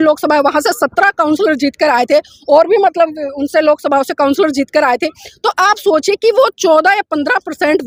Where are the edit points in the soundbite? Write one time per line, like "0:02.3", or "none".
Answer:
none